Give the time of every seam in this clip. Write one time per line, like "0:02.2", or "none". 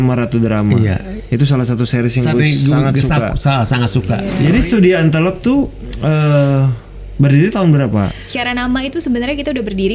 0:04.3
0:08.3

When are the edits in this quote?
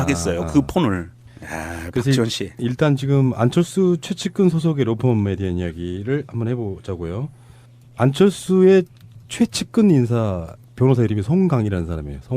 0:09.0

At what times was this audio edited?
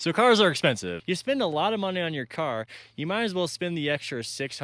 0:00.9

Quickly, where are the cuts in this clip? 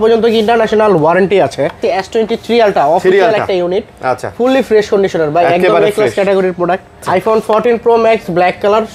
0:01.8
0:07.0

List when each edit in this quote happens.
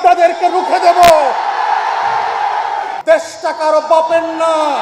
0:02.9

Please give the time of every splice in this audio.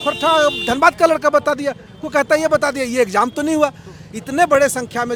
none

